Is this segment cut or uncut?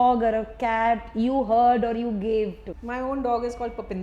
cut